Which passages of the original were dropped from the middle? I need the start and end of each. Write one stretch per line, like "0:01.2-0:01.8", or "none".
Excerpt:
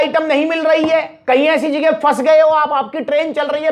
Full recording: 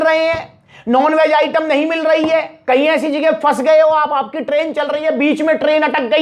none

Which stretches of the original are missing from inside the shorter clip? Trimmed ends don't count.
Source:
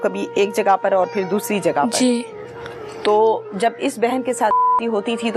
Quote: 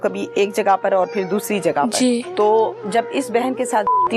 0:02.3-0:02.9

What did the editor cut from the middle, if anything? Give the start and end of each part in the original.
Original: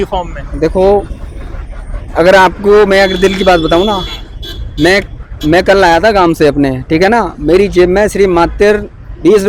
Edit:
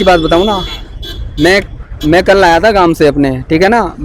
none

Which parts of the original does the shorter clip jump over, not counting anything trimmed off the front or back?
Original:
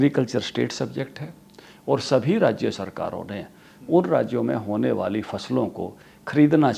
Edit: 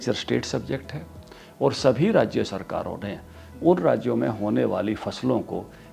none

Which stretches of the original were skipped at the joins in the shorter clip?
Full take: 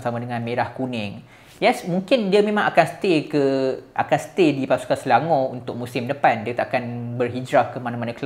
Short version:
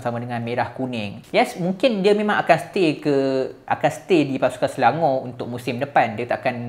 0:01.2-0:01.4

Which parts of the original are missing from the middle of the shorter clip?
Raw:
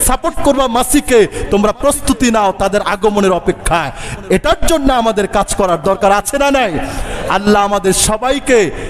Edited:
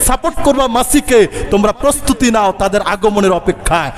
none

